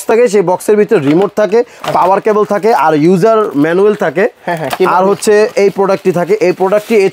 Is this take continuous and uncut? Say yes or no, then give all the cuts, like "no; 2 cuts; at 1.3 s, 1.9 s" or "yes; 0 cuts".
yes; 0 cuts